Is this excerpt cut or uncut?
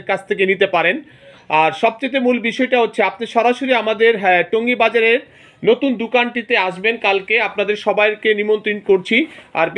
uncut